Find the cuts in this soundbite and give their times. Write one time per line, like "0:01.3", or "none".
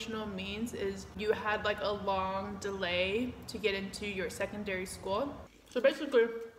0:01.1
0:05.5